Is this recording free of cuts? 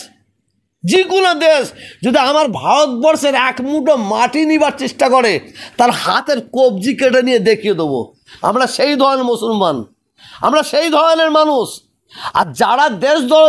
yes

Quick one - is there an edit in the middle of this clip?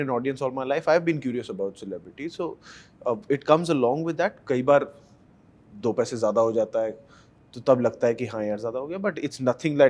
no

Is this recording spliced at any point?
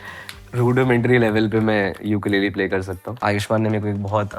yes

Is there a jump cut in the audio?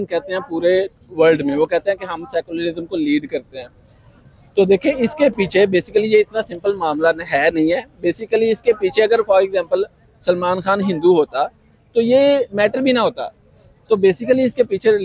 no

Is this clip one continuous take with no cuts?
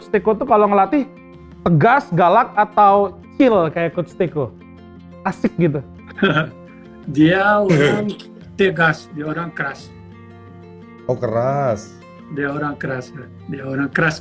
yes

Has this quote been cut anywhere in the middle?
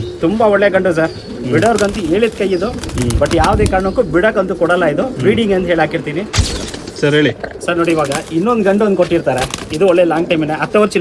yes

